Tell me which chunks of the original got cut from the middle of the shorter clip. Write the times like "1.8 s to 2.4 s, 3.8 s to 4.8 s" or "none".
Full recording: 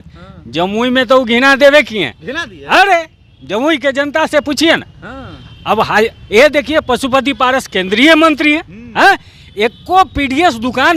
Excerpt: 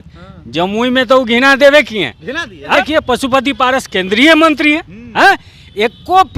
2.7 s to 6.5 s